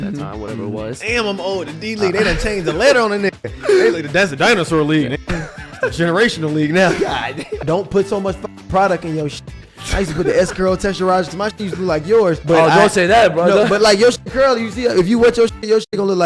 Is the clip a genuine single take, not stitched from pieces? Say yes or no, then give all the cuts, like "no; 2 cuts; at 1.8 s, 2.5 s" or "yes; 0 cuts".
no; 2 cuts; at 7.6 s, 12.4 s